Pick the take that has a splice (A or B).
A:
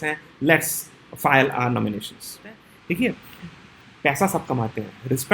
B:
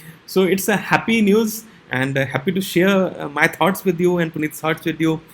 A